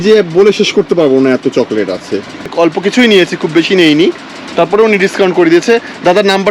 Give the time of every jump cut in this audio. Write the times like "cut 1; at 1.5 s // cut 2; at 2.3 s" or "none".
none